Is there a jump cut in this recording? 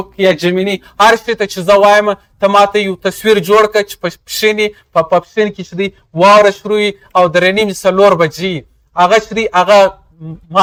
no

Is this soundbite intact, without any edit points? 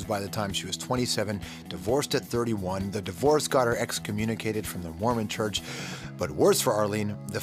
yes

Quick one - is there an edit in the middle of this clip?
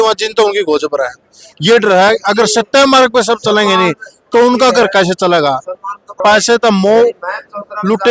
yes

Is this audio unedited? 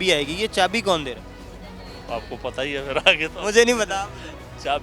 yes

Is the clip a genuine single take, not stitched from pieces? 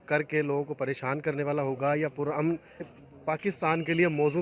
no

